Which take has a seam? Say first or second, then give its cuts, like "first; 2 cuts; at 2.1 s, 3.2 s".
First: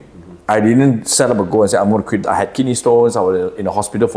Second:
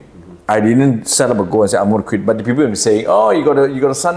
first; 1 cut; at 2.2 s